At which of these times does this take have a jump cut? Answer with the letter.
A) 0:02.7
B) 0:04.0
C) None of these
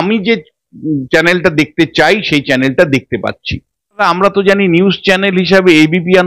B